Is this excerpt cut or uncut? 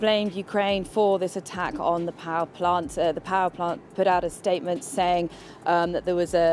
uncut